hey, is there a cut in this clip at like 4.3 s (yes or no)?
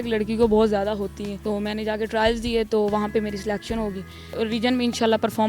yes